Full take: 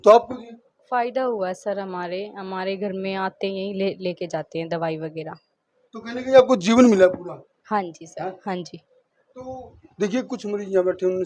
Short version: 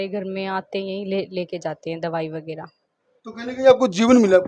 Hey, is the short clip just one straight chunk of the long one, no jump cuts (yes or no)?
yes